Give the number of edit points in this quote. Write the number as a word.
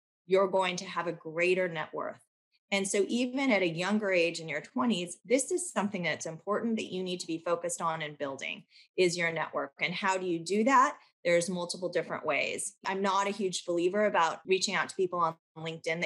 two